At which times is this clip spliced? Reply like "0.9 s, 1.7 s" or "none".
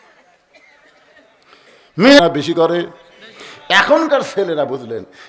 2.2 s